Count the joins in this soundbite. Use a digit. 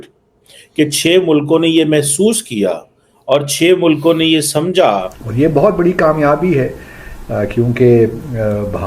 1